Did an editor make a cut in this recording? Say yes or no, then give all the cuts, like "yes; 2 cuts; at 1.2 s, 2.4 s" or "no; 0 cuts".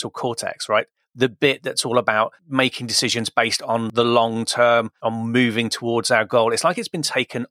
no; 0 cuts